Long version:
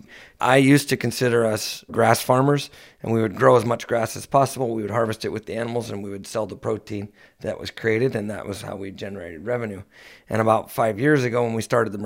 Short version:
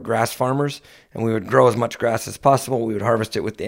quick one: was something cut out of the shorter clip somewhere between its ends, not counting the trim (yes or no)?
no